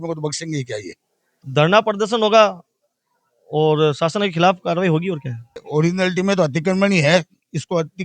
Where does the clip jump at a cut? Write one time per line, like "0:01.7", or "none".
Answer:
0:01.4
0:05.6